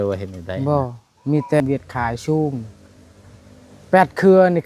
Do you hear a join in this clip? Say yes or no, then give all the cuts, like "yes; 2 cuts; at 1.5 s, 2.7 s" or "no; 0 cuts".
yes; 1 cut; at 1.6 s